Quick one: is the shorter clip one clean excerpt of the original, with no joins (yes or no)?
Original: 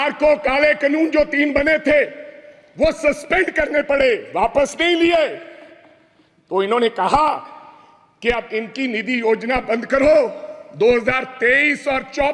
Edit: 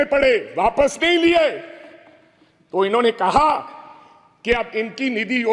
yes